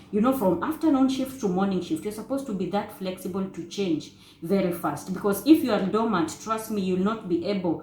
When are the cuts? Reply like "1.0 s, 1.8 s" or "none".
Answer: none

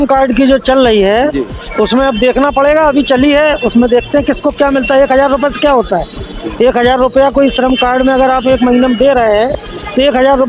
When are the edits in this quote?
none

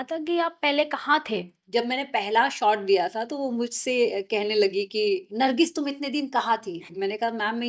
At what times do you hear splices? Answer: 1.5 s, 5.3 s, 6.9 s

